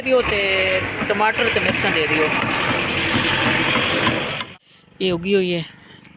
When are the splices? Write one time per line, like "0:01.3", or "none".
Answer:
0:04.4